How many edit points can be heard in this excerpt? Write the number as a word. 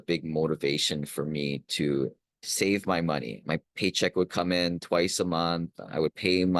one